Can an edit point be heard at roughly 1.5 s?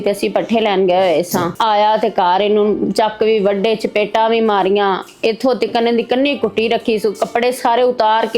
yes; 1 cut; at 1.5 s

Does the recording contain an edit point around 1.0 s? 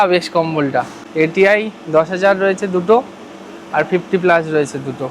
yes; 1 cut; at 1.0 s

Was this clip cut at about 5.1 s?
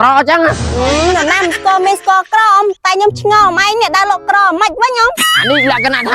yes; 1 cut; at 5.1 s

